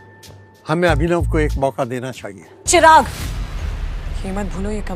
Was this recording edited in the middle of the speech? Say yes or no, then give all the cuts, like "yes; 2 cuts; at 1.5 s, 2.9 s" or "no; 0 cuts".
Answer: yes; 1 cut; at 2.5 s